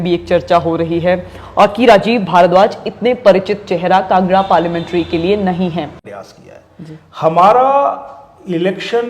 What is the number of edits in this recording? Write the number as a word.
one